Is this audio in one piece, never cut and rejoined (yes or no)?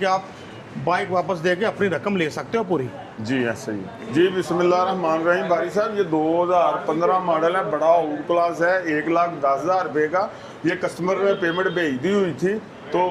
yes